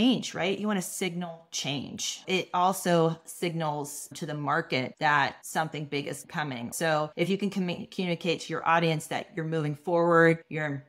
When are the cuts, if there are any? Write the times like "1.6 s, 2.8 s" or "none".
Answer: 2.2 s, 6.7 s